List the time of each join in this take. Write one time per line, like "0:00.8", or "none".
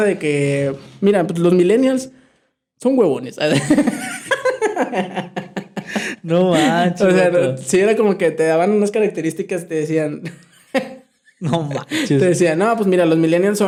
none